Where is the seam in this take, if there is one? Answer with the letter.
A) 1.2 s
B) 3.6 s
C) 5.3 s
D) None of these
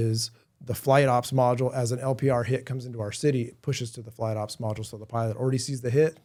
D